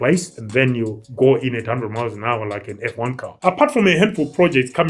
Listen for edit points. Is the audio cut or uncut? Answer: cut